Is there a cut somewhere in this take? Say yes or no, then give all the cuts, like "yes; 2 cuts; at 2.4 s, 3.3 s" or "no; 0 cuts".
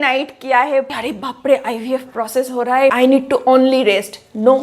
yes; 2 cuts; at 0.9 s, 2.9 s